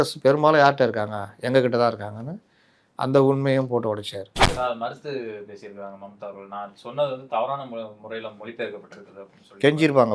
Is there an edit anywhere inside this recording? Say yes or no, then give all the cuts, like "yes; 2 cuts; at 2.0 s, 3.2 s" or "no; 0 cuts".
yes; 1 cut; at 4.4 s